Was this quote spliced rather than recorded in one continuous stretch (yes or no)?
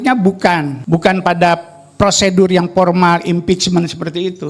no